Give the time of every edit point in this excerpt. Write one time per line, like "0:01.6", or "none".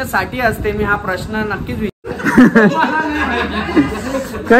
0:01.9